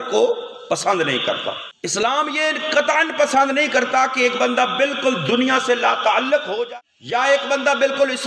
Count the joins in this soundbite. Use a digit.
2